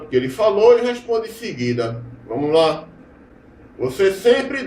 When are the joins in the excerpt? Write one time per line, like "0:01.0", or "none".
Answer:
0:01.2